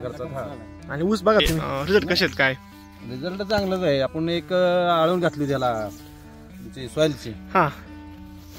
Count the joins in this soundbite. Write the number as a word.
one